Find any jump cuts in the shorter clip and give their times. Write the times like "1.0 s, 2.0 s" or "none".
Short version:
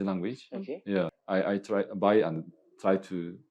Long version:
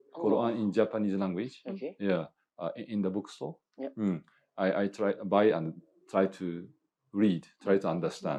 1.2 s

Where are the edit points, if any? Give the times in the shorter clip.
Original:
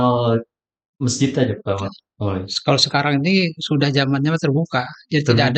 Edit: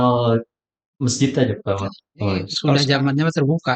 2.5 s

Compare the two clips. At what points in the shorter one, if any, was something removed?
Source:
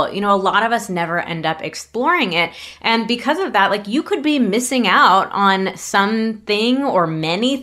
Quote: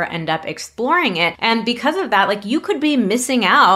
1.4 s

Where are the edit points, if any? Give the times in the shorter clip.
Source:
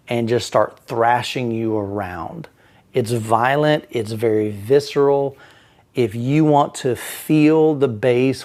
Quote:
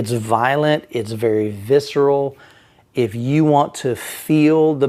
none

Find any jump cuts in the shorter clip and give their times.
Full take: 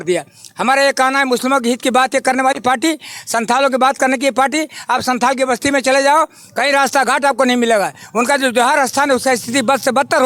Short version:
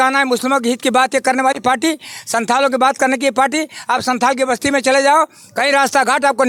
none

